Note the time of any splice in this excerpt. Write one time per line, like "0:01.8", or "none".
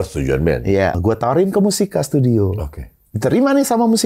0:01.0